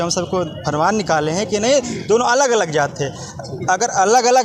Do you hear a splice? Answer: no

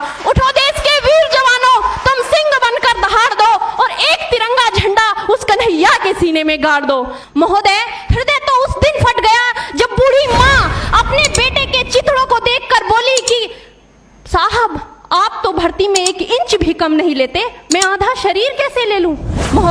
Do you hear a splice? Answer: yes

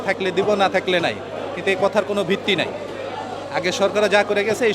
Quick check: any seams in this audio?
no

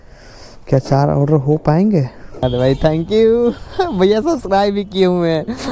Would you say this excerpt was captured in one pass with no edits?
no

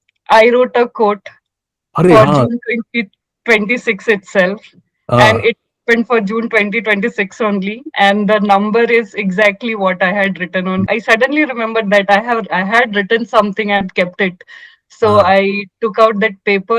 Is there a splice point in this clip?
yes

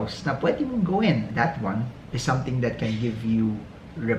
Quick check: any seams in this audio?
yes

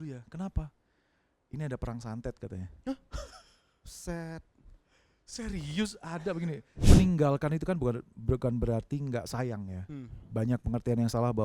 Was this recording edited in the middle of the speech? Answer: yes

